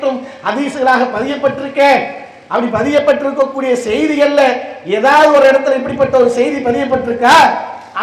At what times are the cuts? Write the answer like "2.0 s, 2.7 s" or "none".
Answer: none

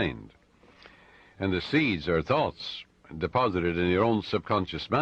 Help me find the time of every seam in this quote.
2.2 s

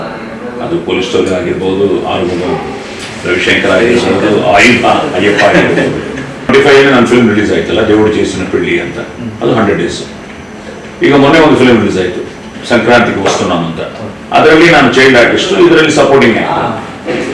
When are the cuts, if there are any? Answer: 6.5 s

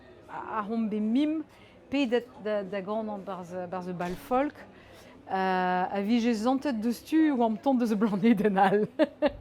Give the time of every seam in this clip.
none

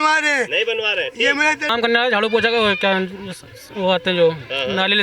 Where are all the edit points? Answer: 1.7 s

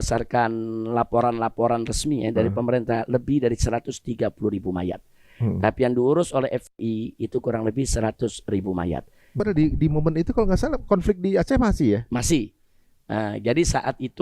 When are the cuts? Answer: 9.4 s

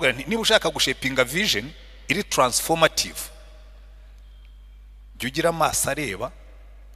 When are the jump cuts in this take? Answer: none

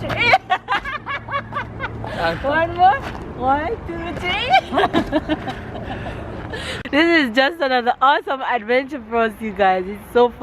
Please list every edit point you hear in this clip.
6.7 s

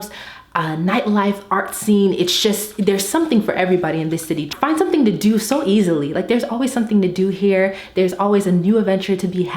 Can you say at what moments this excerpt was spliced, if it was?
4.5 s

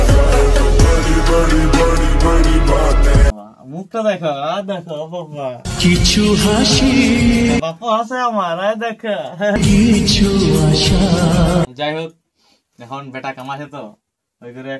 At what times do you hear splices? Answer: 3.3 s, 11.6 s

